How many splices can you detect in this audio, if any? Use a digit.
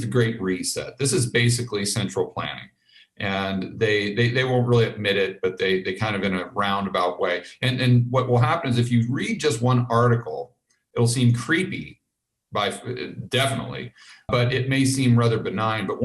2